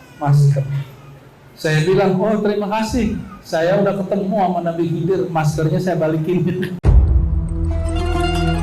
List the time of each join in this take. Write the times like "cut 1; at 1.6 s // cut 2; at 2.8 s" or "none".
cut 1; at 6.8 s